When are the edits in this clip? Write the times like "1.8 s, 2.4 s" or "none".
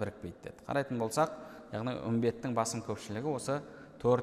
none